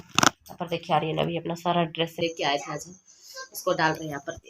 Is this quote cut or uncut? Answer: cut